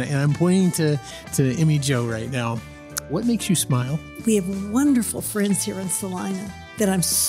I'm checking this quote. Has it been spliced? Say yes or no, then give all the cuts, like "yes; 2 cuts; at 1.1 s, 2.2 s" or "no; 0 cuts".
yes; 1 cut; at 4.0 s